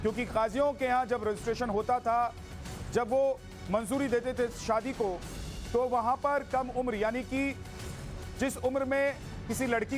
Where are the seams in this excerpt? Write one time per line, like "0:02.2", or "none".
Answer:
none